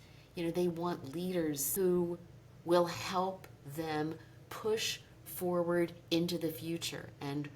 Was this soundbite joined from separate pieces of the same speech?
yes; 1 cut; at 1.6 s

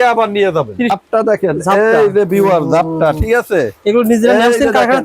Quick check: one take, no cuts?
no; 1 cut; at 1.0 s

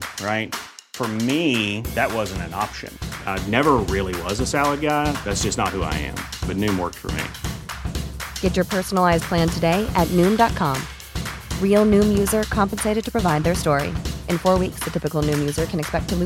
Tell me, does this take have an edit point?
no; 0 cuts

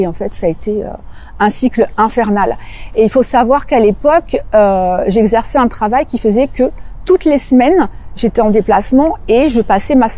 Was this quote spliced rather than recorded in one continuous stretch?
no; 0 cuts

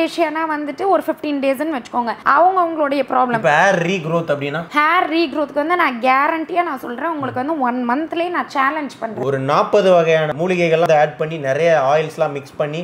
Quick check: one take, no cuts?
no; 2 cuts; at 9.2 s, 10.9 s

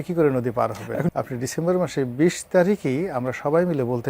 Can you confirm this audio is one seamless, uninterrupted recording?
no; 1 cut; at 1.1 s

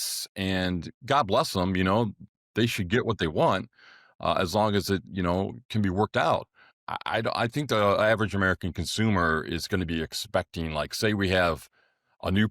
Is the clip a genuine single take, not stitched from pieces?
no; 1 cut; at 6.8 s

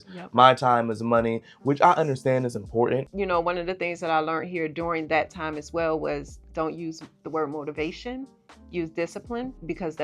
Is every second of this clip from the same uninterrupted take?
no; 1 cut; at 3.1 s

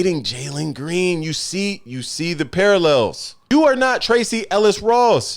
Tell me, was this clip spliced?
yes; 1 cut; at 3.5 s

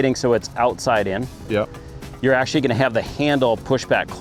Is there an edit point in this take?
no; 0 cuts

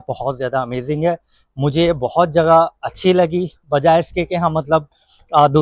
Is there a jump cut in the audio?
no; 0 cuts

